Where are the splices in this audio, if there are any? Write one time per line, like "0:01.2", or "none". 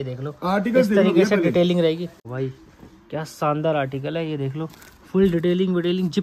0:02.2